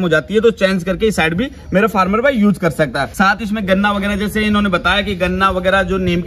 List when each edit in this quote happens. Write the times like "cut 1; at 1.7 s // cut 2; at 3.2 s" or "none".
cut 1; at 3.0 s